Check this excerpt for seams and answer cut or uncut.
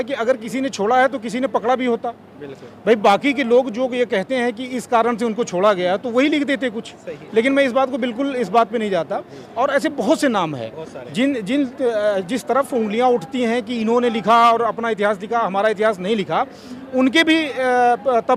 uncut